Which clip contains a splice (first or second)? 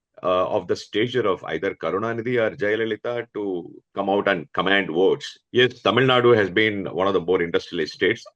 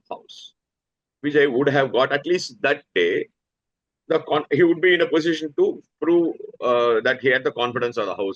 first